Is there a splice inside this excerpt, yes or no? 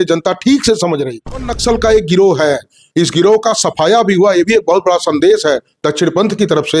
yes